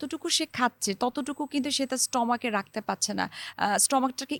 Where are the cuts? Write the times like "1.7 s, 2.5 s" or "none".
none